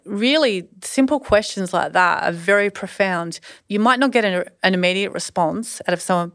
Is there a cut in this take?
yes; 1 cut; at 3.5 s

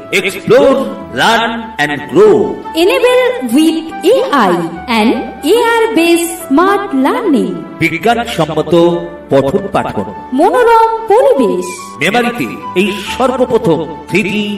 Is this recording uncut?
yes; 0 cuts

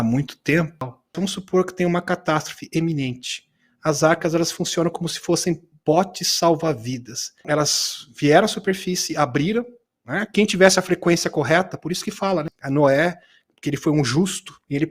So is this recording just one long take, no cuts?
no; 3 cuts; at 1.1 s, 7.4 s, 12.6 s

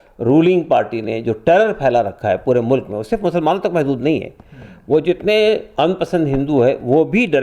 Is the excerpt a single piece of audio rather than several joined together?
yes; 0 cuts

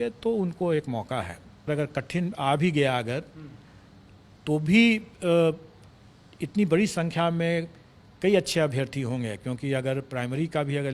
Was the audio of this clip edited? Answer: yes; 1 cut; at 1.7 s

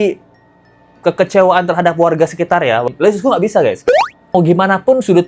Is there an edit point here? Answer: yes; 2 cuts; at 2.9 s, 4.2 s

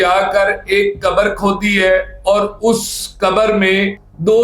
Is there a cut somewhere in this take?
no; 0 cuts

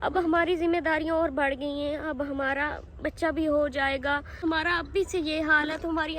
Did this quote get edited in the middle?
yes; 1 cut; at 4.4 s

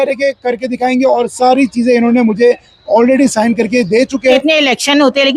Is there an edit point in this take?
yes; 1 cut; at 4.4 s

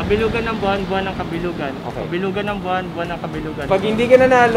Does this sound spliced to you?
yes; 1 cut; at 3.6 s

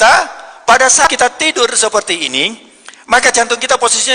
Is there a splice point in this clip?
yes; 1 cut; at 1.0 s

